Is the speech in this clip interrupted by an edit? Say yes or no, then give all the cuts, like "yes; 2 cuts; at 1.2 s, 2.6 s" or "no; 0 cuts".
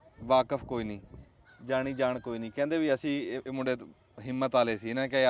no; 0 cuts